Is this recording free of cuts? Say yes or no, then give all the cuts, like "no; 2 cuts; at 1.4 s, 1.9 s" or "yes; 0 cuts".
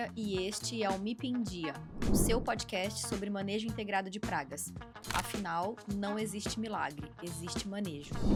yes; 0 cuts